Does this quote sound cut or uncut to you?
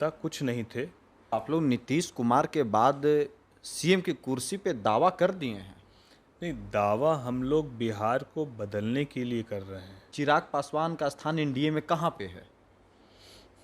cut